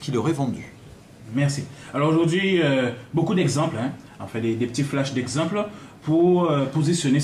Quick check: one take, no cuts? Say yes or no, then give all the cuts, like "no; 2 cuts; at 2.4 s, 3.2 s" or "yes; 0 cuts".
yes; 0 cuts